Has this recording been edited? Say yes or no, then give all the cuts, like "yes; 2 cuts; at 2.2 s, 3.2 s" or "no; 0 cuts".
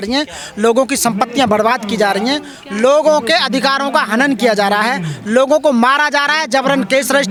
no; 0 cuts